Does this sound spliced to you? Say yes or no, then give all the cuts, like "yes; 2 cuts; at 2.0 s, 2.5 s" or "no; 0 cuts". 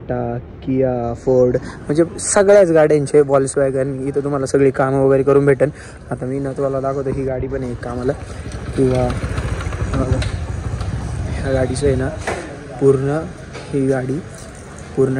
no; 0 cuts